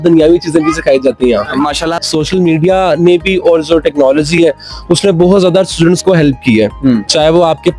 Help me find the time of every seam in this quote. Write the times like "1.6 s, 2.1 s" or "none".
2.0 s